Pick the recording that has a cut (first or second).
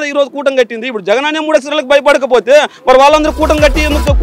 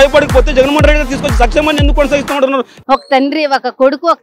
second